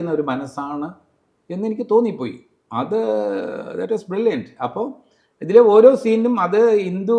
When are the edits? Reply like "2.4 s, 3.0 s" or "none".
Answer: none